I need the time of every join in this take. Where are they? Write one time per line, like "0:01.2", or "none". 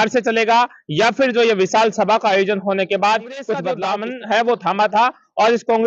0:03.7